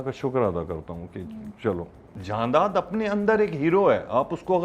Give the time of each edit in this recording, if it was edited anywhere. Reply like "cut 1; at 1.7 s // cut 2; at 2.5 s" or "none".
cut 1; at 2.1 s